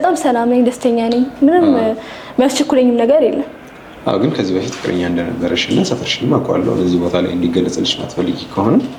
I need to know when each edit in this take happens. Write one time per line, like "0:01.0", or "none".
none